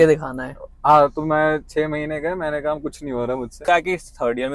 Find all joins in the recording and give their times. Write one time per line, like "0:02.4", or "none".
0:03.7